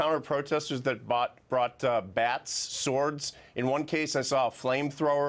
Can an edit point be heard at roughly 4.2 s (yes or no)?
yes